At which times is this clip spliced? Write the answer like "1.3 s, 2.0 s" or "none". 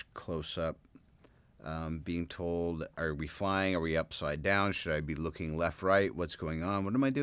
6.2 s